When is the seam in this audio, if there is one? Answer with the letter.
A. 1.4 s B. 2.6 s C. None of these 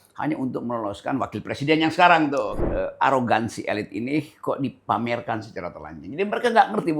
B